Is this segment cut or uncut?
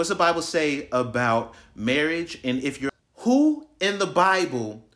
cut